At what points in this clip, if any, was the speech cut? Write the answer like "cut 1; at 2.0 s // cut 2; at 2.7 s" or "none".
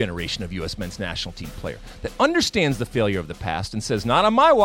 none